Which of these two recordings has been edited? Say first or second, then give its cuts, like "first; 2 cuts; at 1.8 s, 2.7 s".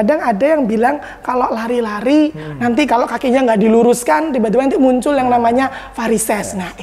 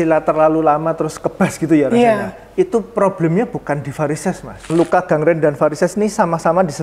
second; 1 cut; at 4.7 s